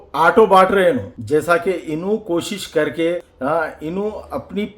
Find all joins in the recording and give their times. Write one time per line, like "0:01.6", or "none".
0:01.1
0:03.3